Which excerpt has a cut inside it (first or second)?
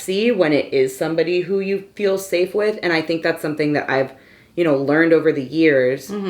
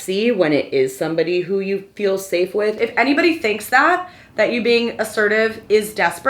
second